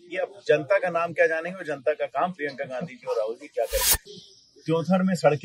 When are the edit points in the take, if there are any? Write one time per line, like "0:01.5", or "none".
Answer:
0:04.1